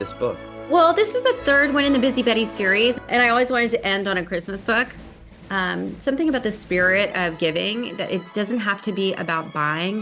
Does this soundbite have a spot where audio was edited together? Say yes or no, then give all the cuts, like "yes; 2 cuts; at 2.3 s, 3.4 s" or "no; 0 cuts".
yes; 1 cut; at 3.0 s